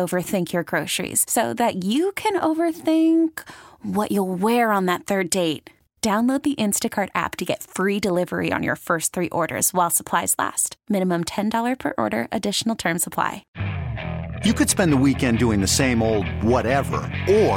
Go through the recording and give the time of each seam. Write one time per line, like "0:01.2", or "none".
0:13.4

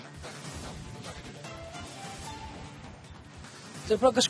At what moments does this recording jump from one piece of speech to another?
0:01.7

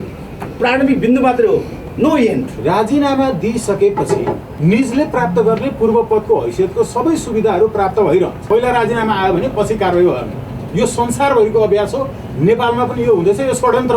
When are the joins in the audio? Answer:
0:02.5
0:04.5
0:08.4

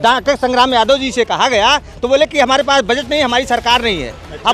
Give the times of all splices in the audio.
none

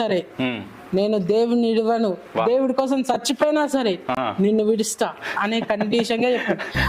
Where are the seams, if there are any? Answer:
none

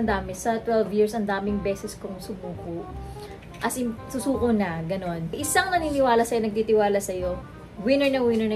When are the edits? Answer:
0:05.4

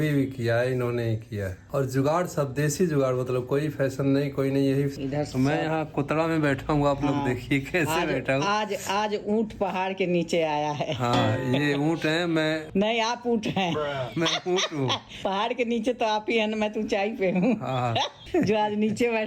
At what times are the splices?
0:01.6
0:04.9
0:18.2

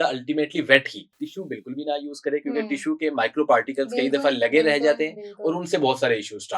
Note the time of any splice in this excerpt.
0:01.3

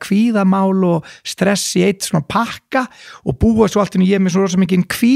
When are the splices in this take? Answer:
none

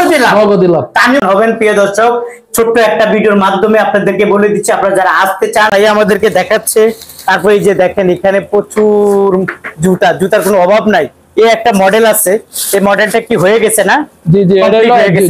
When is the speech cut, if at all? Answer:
0:01.2
0:05.7

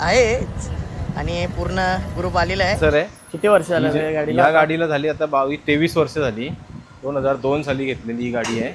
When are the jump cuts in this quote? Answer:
0:02.8

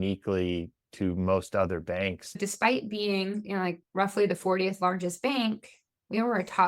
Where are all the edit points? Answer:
0:02.4

